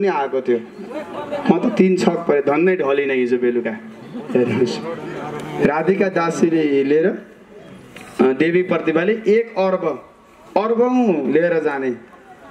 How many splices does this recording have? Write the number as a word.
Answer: zero